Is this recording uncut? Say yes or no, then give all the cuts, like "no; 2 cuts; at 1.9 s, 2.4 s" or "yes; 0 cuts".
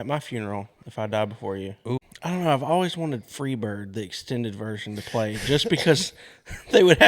no; 1 cut; at 2.1 s